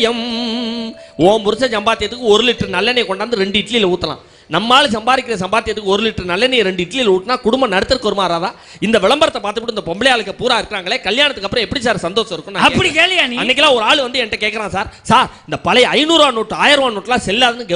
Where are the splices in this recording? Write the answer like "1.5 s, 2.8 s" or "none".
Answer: none

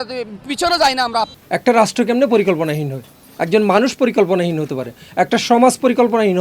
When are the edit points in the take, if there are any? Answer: 1.3 s

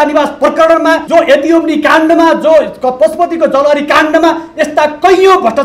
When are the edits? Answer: 1.0 s

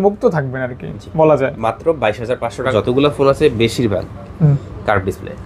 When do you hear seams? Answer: 2.7 s

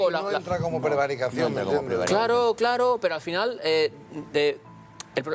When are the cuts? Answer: 3.6 s

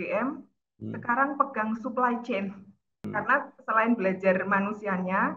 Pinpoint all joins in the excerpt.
3.0 s

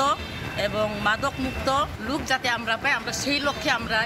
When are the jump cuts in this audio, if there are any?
2.0 s

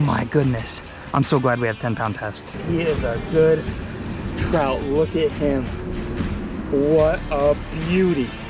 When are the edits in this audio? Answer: 2.5 s

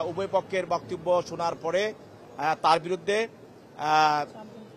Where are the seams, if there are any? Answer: none

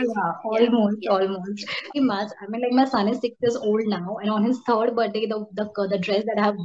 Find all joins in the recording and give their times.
1.9 s

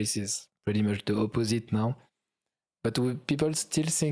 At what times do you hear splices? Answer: none

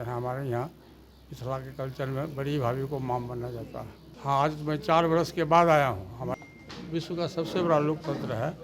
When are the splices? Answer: 4.0 s, 6.3 s

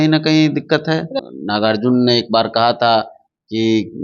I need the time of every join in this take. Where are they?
1.1 s

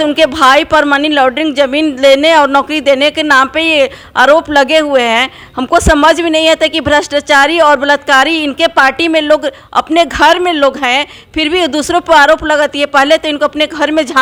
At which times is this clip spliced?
none

